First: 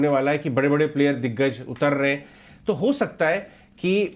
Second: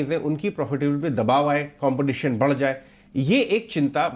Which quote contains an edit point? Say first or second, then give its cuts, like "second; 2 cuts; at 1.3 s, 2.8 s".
second; 1 cut; at 3.3 s